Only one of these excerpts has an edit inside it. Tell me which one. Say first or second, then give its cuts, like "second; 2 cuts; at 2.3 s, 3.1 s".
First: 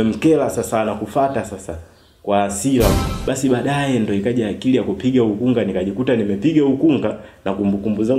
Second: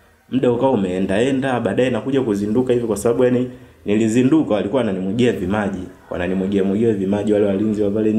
first; 1 cut; at 3.0 s